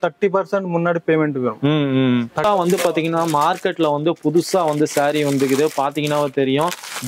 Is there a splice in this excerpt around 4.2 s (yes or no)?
no